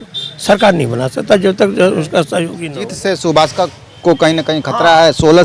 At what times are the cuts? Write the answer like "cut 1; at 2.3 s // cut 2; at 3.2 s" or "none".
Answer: cut 1; at 2.6 s